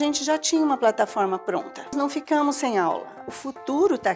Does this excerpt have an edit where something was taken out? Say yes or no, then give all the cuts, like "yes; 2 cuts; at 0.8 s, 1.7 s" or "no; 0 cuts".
yes; 2 cuts; at 2.0 s, 3.1 s